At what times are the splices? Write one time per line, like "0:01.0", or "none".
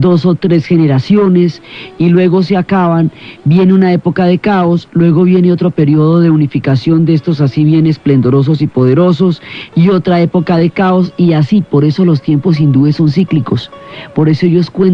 none